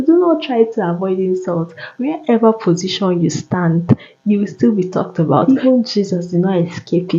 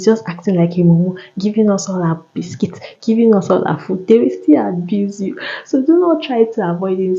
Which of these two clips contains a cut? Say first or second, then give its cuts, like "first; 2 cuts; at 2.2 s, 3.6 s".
first; 1 cut; at 5.4 s